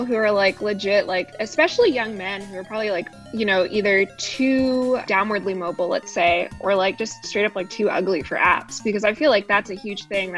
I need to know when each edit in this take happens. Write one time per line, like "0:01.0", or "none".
0:01.4
0:03.2
0:05.0